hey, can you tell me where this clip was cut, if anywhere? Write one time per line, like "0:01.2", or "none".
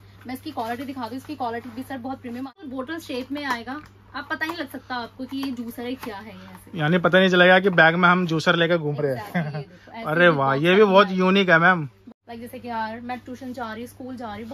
0:02.5
0:12.0